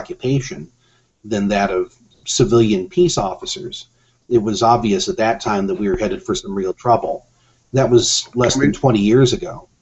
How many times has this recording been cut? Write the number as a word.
one